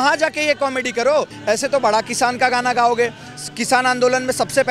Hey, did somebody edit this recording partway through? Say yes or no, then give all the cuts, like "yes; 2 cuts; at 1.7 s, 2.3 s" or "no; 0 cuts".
yes; 1 cut; at 1.3 s